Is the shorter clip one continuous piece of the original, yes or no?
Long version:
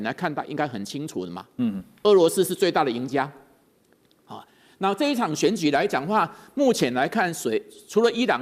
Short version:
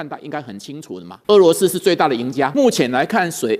no